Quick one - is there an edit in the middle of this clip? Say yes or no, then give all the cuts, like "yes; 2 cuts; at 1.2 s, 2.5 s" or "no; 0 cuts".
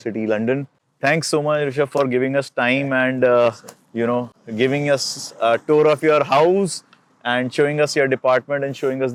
no; 0 cuts